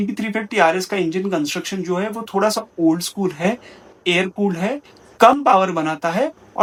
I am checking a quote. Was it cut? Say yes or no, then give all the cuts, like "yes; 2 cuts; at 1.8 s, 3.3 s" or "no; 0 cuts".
no; 0 cuts